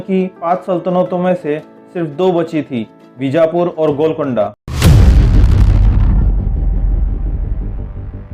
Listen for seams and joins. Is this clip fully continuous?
yes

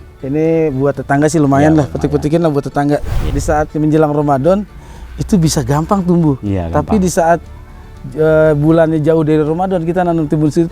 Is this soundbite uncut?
no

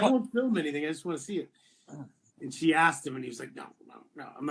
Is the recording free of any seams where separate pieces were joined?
yes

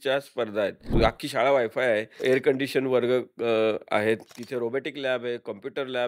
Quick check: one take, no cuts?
no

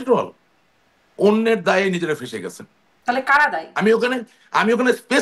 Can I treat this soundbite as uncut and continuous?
yes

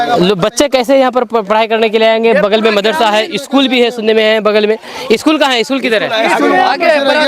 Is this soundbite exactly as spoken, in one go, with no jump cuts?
yes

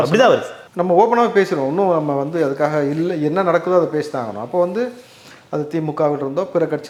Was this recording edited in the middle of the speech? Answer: no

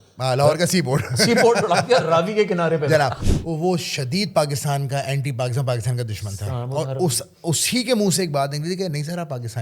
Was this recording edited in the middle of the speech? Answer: yes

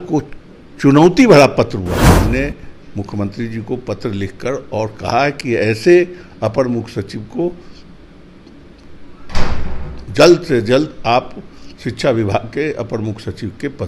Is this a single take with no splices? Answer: no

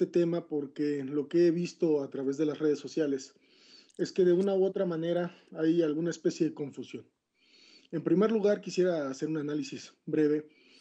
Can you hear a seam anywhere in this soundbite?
yes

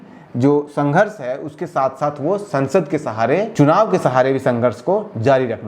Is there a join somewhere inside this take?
yes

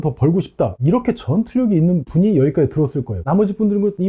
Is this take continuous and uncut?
no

